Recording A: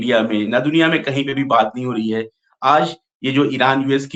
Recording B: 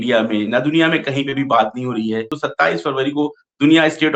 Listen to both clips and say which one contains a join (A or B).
B